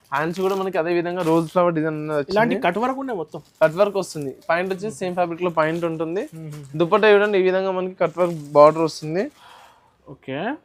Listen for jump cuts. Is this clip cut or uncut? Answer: uncut